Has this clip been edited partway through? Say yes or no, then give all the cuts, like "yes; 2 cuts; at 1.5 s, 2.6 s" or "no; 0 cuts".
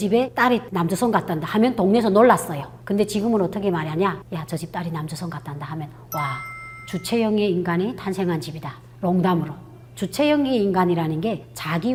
no; 0 cuts